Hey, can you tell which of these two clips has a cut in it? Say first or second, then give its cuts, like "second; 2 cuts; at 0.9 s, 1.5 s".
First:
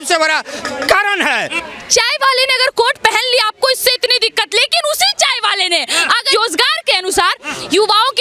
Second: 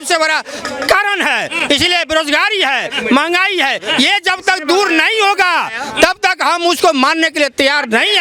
first; 2 cuts; at 1.6 s, 6.3 s